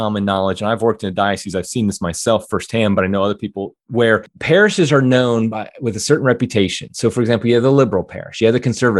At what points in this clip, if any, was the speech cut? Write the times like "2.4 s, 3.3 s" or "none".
4.3 s